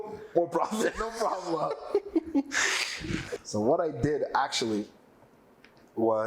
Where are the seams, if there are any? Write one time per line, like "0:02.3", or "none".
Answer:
0:03.4